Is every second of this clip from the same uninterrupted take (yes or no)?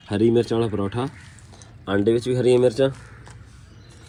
yes